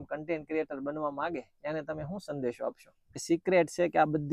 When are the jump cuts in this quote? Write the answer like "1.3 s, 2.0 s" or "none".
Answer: 3.2 s